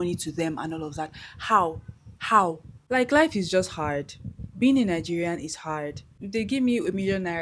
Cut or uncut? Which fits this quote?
cut